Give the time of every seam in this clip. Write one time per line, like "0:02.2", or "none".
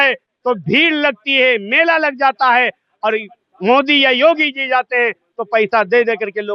none